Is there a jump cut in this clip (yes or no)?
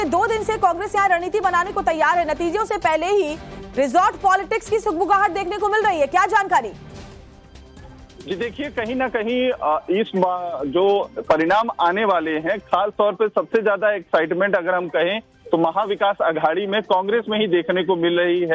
no